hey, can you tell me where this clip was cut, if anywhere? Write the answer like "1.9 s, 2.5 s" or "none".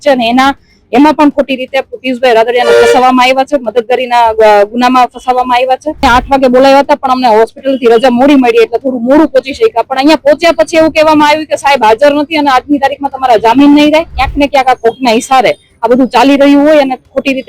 6.1 s, 14.2 s